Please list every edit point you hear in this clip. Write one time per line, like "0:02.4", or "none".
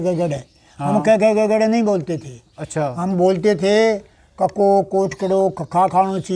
none